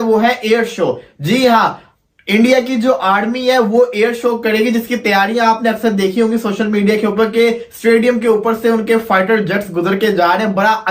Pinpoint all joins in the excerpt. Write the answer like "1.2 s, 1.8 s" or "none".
none